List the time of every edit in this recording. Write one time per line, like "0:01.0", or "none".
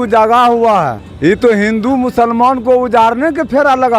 0:01.0